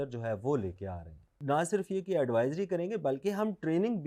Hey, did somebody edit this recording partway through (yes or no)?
yes